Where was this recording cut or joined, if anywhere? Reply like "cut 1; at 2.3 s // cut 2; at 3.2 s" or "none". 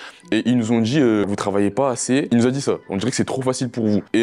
none